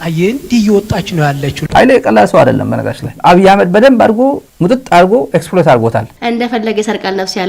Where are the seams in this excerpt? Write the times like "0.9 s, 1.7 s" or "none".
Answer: 3.1 s, 6.1 s